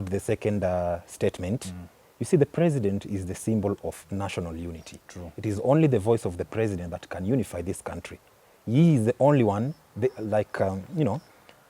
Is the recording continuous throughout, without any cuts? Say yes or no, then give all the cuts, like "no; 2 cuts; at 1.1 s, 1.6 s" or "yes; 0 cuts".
yes; 0 cuts